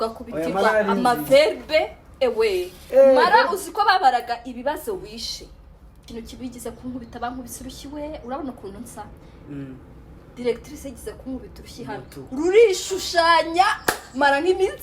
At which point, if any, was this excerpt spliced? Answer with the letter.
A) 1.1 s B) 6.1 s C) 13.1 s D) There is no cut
B